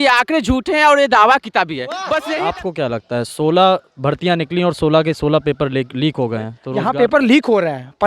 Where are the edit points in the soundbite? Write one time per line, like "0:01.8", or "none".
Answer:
0:02.2
0:06.6